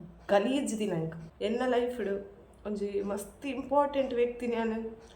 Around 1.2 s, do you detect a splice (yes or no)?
yes